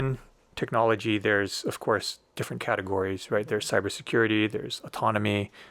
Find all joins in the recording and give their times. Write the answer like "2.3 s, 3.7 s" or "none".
none